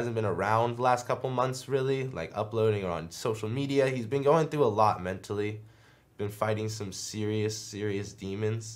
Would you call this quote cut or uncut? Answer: uncut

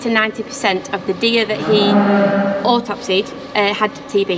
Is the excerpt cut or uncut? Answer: uncut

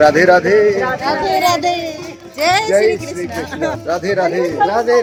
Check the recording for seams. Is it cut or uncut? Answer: uncut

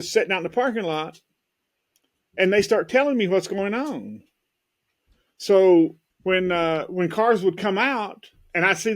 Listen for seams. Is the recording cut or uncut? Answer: cut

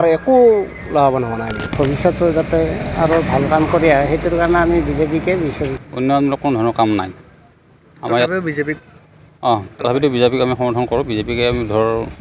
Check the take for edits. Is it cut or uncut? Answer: cut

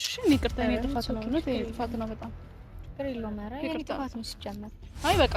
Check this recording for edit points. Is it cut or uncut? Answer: uncut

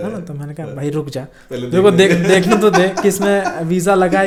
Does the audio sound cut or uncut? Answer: uncut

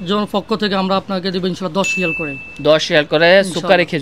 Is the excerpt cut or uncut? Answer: uncut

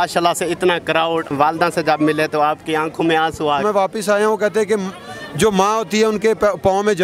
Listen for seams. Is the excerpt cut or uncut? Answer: cut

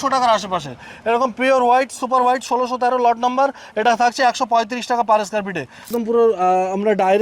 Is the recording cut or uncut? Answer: cut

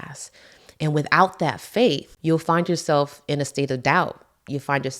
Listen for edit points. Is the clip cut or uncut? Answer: cut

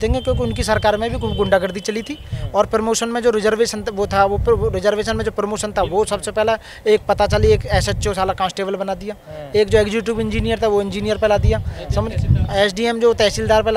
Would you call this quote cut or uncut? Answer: uncut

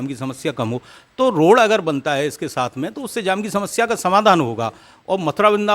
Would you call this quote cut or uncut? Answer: uncut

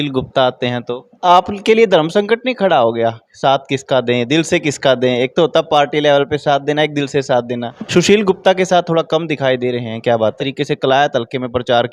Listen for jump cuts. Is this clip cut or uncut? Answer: cut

